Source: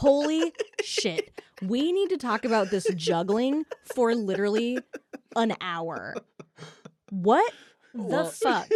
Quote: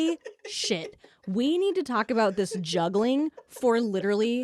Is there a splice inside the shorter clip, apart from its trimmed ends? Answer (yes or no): no